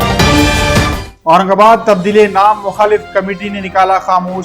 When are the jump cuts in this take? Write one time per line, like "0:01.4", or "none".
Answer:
0:01.1

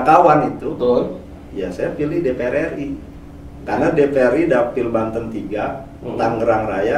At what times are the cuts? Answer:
none

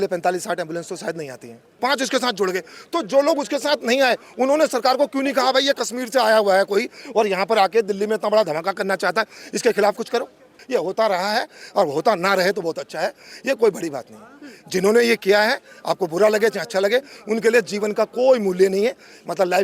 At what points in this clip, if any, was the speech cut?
0:01.7
0:10.6

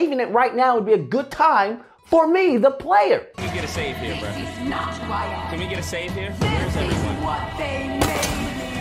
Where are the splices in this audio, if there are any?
0:03.3

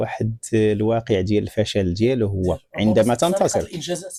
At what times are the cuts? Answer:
none

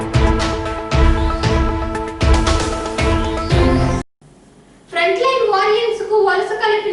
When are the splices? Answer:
0:04.0

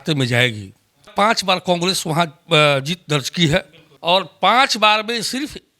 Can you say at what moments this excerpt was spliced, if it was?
0:01.4
0:04.3

